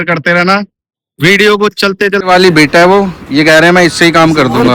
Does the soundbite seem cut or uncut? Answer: cut